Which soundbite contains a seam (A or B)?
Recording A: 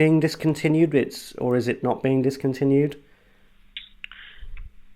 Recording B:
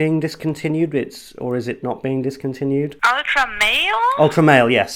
B